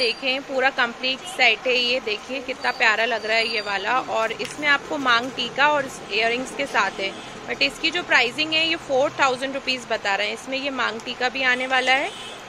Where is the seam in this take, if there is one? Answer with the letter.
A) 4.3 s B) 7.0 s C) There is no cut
C